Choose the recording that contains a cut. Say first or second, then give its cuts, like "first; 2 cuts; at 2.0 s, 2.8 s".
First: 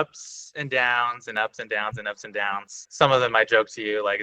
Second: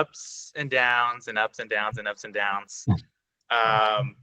first; 1 cut; at 2.8 s